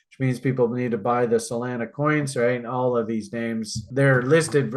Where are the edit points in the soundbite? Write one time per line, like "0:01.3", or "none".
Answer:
none

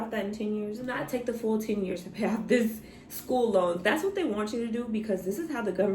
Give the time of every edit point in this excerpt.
0:00.9

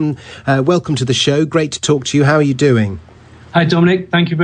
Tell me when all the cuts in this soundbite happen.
none

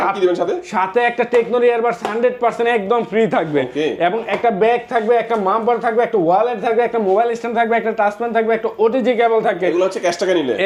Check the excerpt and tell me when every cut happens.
none

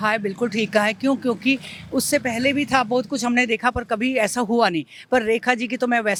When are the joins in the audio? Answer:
none

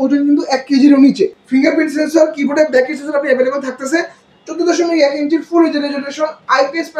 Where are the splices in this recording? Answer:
0:01.4

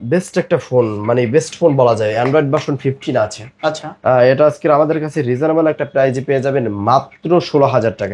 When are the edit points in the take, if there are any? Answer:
none

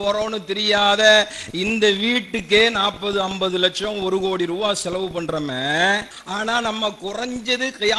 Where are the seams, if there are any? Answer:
0:06.2

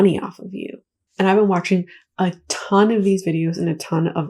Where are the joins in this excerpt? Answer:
0:01.0

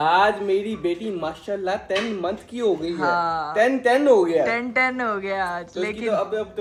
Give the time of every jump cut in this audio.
none

